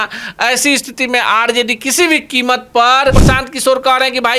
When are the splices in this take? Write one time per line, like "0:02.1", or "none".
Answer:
0:03.2